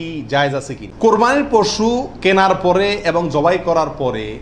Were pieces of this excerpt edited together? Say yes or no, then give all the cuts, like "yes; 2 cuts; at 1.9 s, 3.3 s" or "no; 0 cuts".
yes; 1 cut; at 0.9 s